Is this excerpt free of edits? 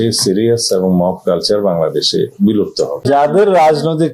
no; 1 cut; at 3.0 s

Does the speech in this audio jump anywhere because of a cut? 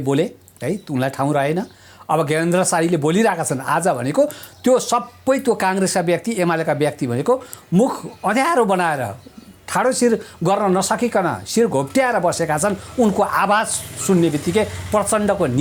no; 0 cuts

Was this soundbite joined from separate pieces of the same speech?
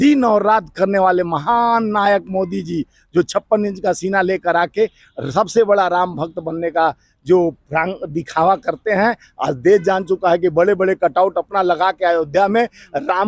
no; 0 cuts

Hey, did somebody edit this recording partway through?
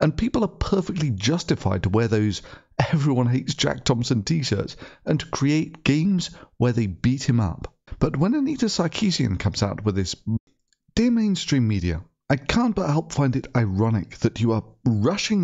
no; 0 cuts

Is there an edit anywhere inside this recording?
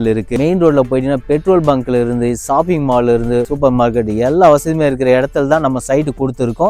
no; 0 cuts

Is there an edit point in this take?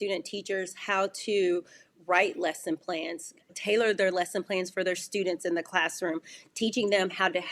no; 0 cuts

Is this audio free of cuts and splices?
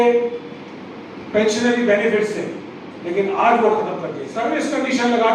no; 1 cut; at 4.3 s

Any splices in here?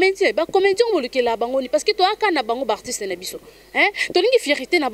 no; 0 cuts

